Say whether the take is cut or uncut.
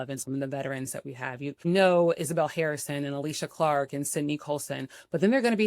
cut